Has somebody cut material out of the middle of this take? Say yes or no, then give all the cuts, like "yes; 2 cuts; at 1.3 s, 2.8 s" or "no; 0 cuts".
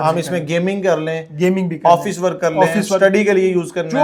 no; 0 cuts